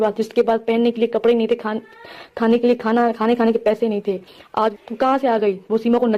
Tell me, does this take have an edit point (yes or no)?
yes